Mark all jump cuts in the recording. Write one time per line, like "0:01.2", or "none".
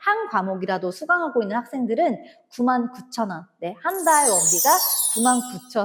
none

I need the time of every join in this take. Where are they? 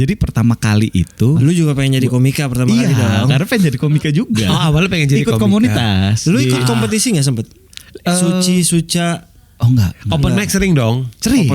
0:01.4

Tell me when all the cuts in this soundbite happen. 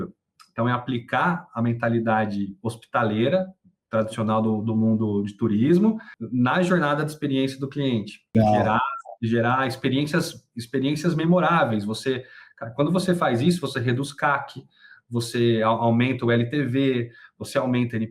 0:06.1
0:08.3

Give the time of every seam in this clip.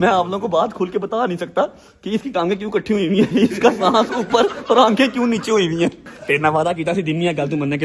0:06.1

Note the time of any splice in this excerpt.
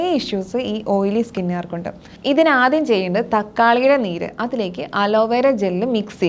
0:02.1

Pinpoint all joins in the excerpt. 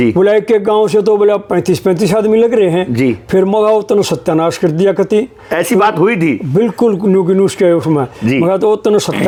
none

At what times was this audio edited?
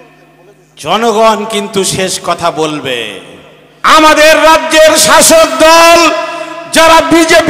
0:03.7

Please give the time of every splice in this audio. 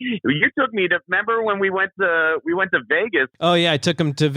0:03.3

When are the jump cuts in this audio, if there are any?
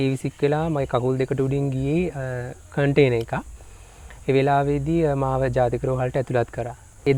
none

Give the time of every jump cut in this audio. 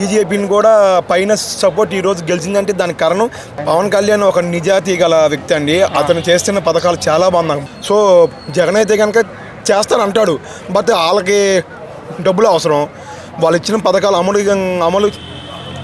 0:03.6
0:07.7

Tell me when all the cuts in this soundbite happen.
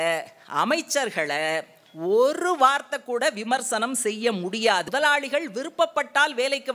0:04.9

